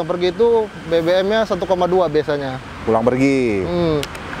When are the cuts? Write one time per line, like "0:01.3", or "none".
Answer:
none